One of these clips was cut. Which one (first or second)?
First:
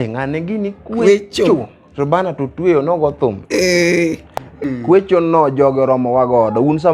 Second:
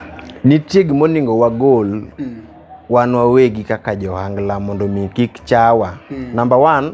first